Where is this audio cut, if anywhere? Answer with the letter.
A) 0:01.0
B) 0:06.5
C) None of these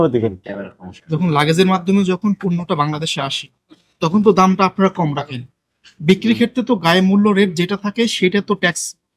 A